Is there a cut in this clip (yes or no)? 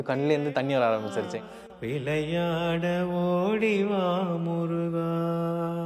yes